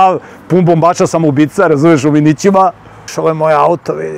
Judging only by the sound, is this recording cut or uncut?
cut